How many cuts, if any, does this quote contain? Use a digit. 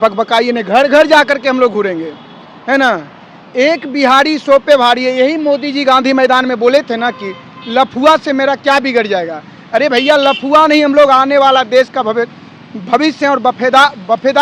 0